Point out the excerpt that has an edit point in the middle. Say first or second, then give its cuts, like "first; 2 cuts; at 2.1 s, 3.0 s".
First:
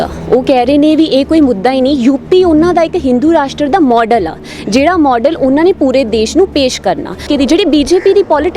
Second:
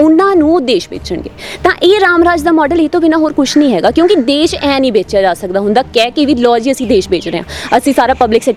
first; 1 cut; at 7.3 s